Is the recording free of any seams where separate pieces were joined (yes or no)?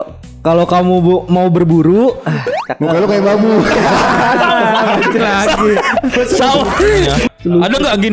no